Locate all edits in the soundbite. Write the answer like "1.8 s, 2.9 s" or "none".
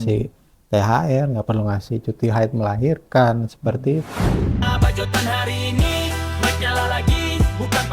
4.5 s